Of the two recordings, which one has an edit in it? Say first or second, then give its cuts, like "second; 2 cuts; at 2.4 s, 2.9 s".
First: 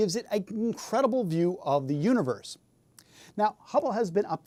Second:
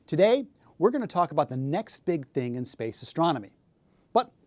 second; 1 cut; at 2.5 s